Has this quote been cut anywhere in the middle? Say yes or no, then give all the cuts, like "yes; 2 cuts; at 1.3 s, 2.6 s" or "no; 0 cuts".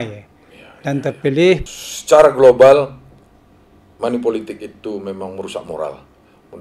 yes; 1 cut; at 1.6 s